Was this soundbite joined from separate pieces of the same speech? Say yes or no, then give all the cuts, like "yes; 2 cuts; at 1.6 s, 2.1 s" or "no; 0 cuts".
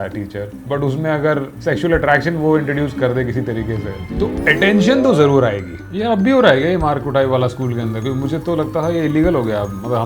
yes; 2 cuts; at 1.5 s, 5.9 s